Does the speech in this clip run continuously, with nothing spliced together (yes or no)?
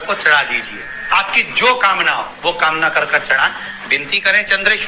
yes